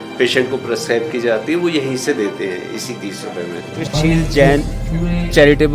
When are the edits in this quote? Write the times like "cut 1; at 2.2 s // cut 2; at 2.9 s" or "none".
cut 1; at 3.9 s